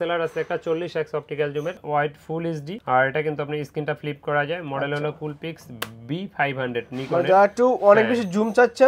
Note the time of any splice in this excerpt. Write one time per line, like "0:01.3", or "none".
none